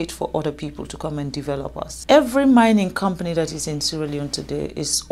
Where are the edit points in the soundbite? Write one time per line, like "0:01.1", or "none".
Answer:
0:02.0